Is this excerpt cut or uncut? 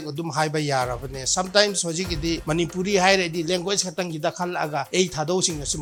uncut